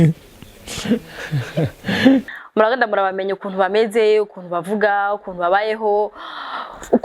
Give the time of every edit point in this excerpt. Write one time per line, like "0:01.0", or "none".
0:02.4